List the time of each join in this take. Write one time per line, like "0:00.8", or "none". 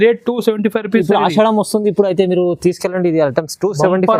none